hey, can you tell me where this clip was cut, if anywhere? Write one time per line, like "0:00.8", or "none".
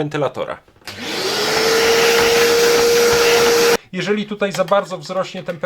0:03.8